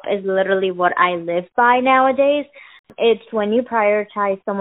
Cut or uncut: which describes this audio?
cut